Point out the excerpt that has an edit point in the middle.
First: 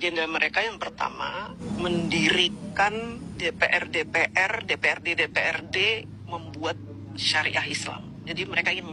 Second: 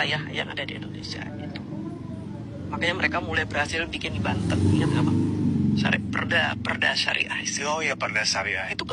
first; 2 cuts; at 1.6 s, 3.3 s

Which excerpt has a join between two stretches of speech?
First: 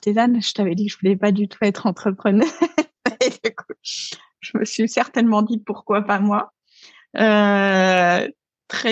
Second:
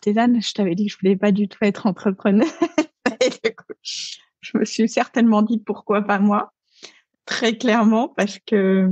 second; 1 cut; at 7.0 s

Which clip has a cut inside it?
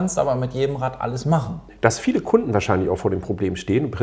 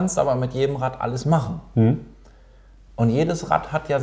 first; 1 cut; at 1.6 s

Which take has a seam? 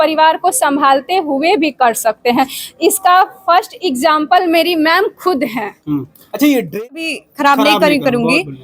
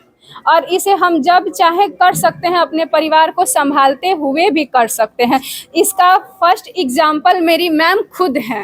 first; 1 cut; at 7.1 s

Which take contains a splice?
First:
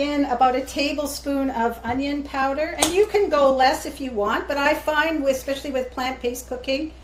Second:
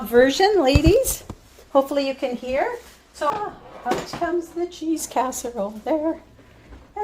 second; 1 cut; at 3.3 s

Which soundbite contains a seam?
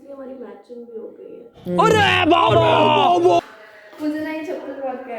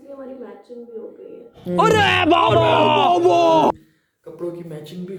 first; 1 cut; at 3.4 s

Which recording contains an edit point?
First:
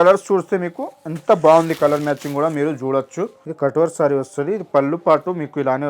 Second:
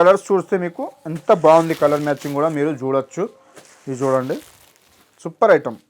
first; 1 cut; at 3.4 s

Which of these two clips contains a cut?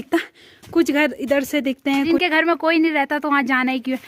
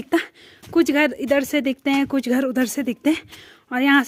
first; 1 cut; at 2.1 s

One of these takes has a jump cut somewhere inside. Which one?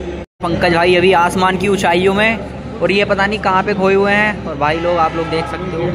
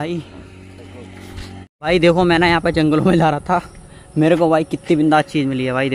second; 1 cut; at 1.7 s

